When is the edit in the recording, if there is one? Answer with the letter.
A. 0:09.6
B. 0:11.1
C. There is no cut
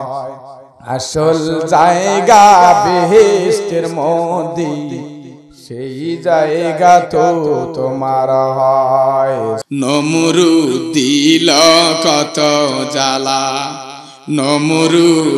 A